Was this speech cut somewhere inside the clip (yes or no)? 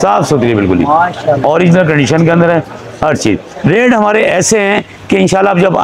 no